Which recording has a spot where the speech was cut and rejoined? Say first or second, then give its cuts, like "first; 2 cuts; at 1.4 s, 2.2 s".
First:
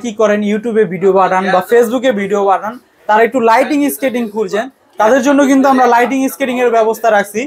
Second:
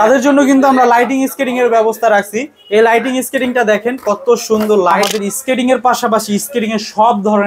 second; 1 cut; at 5.0 s